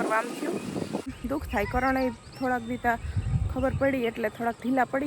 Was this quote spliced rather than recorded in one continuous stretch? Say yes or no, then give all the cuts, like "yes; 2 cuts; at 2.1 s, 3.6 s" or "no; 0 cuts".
yes; 1 cut; at 1.1 s